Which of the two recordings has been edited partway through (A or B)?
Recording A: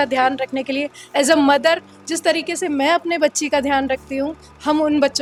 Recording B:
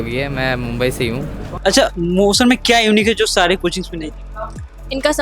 B